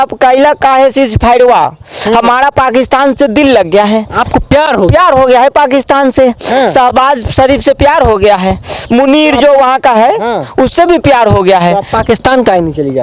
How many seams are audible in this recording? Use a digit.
0